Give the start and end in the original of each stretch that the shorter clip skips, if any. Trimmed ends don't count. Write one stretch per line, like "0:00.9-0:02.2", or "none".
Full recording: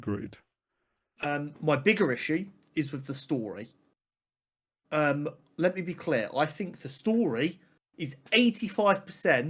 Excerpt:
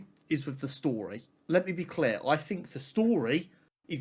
0:03.8-0:05.4